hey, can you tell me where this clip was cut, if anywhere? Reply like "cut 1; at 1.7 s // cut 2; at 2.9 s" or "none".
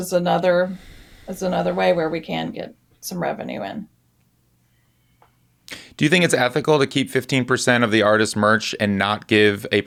none